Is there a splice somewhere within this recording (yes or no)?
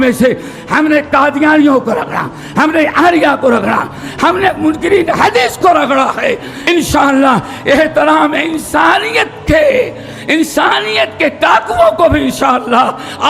yes